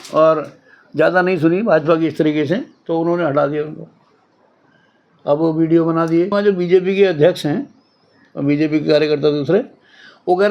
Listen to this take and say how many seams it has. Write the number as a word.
one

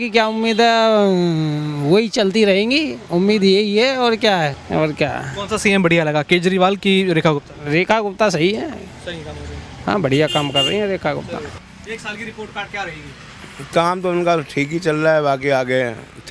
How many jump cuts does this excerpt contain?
two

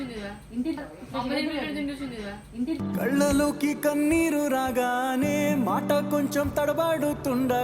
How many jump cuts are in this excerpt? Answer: two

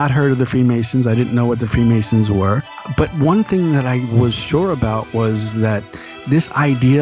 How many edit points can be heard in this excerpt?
one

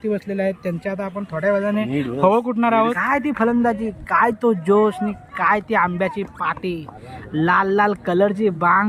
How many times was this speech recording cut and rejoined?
one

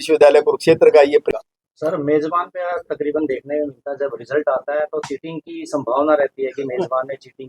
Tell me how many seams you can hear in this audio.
one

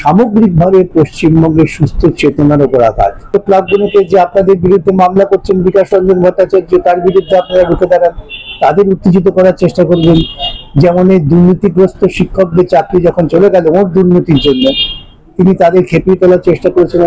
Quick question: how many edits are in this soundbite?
one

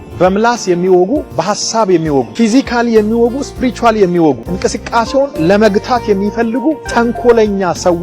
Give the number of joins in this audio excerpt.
four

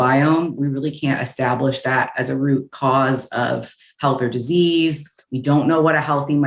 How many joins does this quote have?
zero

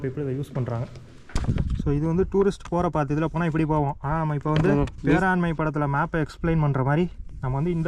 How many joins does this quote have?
two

